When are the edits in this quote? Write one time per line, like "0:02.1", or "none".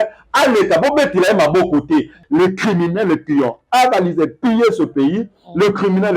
0:02.2